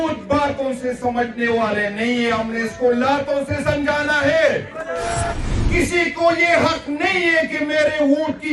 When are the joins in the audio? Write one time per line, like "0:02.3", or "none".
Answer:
0:05.3